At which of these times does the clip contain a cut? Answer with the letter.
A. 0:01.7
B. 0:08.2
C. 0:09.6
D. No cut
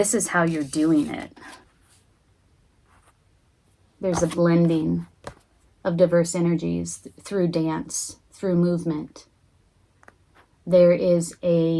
A